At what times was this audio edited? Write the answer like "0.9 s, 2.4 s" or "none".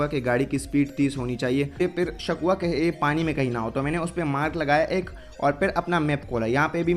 1.8 s